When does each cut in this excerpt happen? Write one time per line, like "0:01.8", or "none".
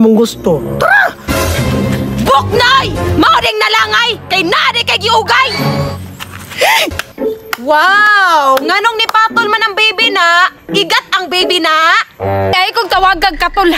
0:07.0
0:12.5